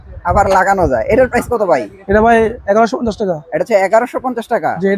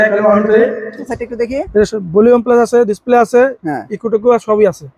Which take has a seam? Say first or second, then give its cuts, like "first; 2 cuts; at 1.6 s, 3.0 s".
second; 1 cut; at 1.2 s